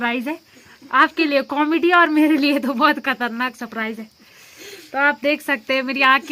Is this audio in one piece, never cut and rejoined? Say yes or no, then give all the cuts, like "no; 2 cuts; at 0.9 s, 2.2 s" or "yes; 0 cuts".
yes; 0 cuts